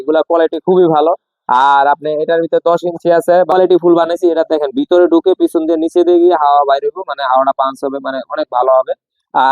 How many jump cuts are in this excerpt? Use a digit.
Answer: 1